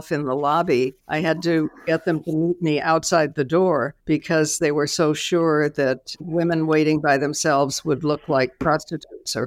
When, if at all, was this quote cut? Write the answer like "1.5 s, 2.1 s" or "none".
1.0 s, 3.9 s

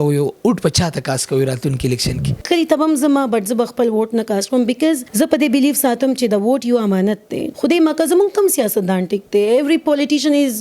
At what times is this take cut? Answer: 2.4 s, 5.1 s, 7.4 s

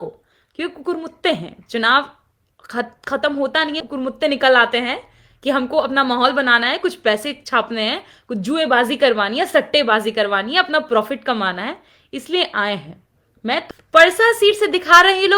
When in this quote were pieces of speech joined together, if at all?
13.6 s

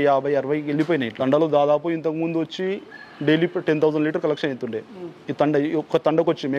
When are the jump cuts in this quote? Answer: 1.2 s

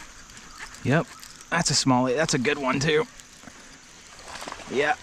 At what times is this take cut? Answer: none

